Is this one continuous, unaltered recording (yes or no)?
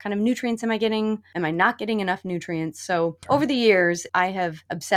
no